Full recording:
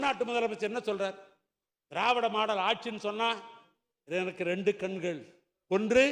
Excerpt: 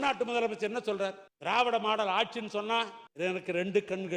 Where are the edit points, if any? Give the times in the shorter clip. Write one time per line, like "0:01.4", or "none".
0:01.3
0:03.0